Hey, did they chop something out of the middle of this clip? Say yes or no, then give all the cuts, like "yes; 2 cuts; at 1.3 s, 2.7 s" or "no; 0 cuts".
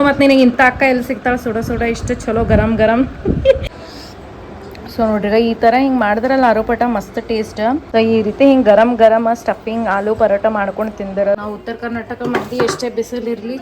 yes; 3 cuts; at 3.6 s, 7.8 s, 11.4 s